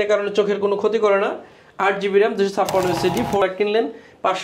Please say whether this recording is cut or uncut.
cut